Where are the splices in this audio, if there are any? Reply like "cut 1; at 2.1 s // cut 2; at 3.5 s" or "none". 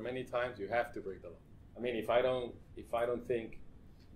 cut 1; at 1.6 s

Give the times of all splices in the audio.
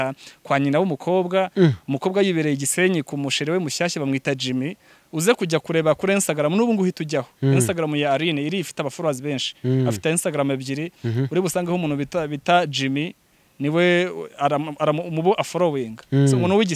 none

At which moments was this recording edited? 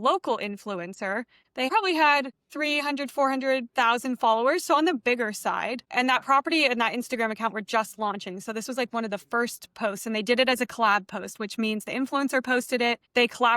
cut 1; at 1.6 s

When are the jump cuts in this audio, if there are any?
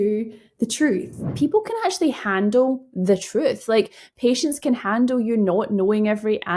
cut 1; at 1.3 s

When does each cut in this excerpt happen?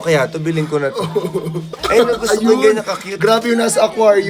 cut 1; at 1.7 s

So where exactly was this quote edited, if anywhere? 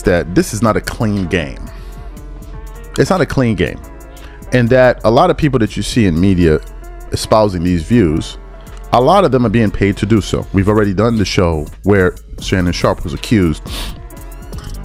none

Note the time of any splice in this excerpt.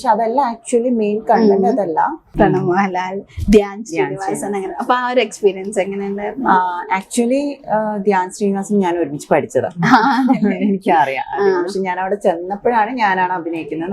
cut 1; at 2.3 s

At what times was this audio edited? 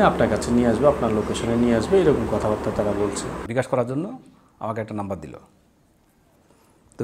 cut 1; at 3.4 s

